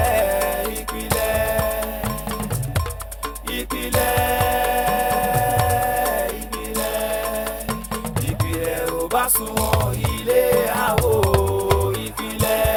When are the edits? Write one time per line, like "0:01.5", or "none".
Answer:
none